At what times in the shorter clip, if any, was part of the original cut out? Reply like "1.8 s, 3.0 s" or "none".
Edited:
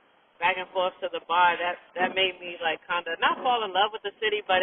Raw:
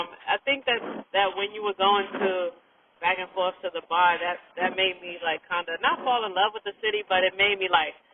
none